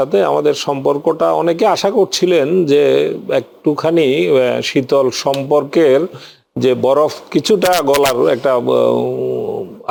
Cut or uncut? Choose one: uncut